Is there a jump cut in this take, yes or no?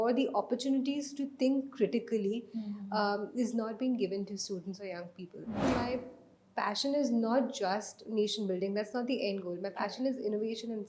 yes